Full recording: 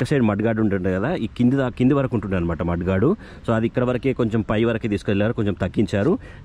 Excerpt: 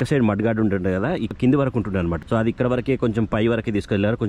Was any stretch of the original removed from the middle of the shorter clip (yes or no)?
yes